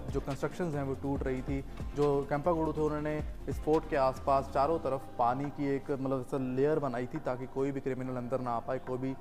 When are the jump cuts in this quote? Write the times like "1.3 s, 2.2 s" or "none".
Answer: none